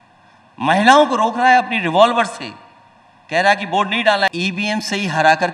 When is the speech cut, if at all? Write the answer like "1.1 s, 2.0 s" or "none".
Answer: 4.3 s